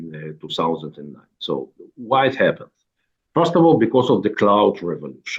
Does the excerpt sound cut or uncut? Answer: uncut